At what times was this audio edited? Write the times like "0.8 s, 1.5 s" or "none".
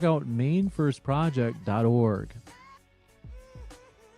3.1 s